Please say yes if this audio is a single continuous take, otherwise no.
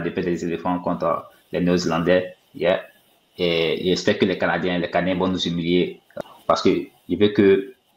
no